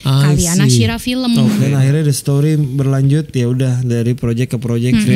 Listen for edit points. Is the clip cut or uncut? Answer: cut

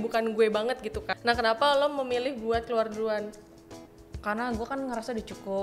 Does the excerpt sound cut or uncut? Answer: cut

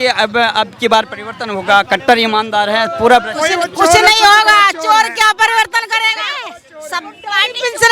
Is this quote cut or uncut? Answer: uncut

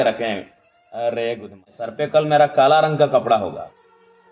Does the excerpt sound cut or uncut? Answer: cut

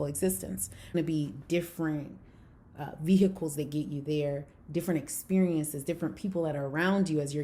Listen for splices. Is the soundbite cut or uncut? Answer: cut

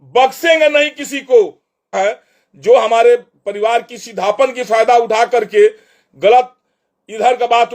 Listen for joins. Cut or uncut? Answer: cut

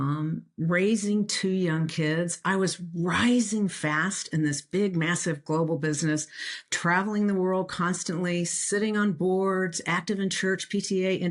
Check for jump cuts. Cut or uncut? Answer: uncut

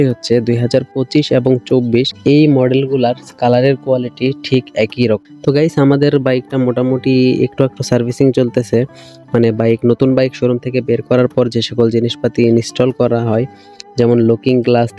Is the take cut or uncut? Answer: uncut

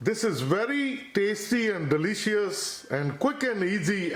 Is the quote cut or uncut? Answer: uncut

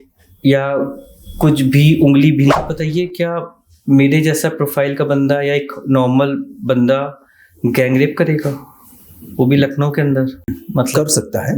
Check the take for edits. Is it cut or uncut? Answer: cut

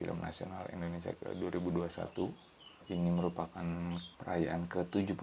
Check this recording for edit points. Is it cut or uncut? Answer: cut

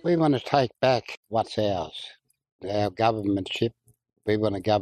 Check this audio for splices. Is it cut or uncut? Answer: cut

